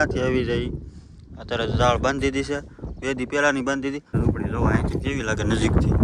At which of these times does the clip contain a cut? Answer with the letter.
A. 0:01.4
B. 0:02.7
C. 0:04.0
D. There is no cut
C